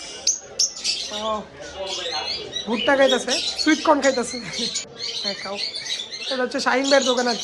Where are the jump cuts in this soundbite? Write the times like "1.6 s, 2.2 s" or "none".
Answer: 4.9 s